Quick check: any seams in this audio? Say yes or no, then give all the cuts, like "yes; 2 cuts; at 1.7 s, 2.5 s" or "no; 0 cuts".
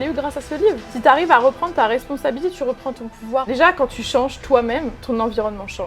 yes; 2 cuts; at 0.9 s, 3.5 s